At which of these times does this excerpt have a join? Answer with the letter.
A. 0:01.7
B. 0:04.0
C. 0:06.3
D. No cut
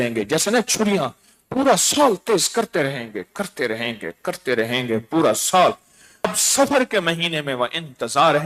C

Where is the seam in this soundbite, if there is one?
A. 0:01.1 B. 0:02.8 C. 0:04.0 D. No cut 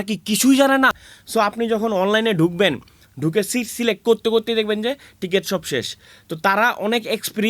A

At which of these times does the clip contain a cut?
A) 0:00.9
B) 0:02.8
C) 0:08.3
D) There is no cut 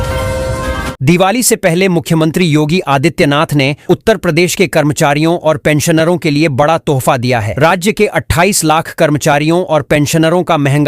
A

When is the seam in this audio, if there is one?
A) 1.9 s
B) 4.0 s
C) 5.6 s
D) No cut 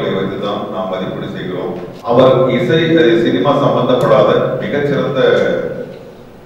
A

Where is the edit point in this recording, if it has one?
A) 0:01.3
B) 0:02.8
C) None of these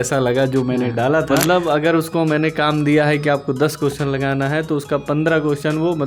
A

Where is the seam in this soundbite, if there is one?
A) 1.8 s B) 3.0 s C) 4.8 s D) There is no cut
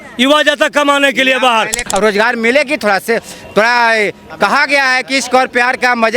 A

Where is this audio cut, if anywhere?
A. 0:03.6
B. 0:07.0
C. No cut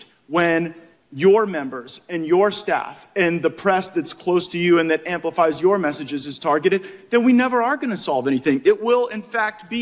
C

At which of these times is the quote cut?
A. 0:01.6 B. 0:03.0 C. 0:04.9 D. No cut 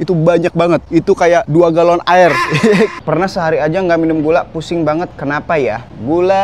B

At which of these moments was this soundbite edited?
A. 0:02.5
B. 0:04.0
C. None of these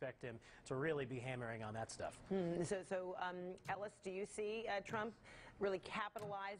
B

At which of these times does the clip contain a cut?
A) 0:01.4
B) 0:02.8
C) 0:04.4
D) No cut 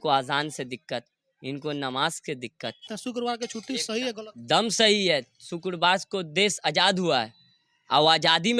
B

